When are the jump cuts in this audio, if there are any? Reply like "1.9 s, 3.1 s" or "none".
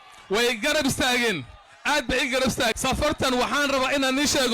2.7 s